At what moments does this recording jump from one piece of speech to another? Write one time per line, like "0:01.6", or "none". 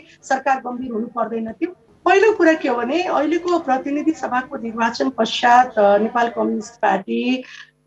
0:01.8